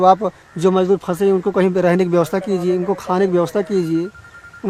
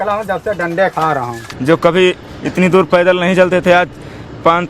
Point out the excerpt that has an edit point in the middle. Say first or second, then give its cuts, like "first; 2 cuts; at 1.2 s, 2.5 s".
second; 1 cut; at 1.4 s